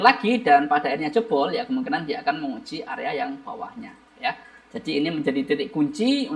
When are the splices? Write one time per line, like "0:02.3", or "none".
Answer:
none